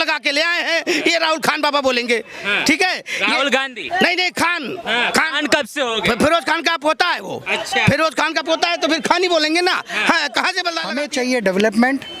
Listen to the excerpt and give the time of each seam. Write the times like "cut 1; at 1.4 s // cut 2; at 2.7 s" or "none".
cut 1; at 10.9 s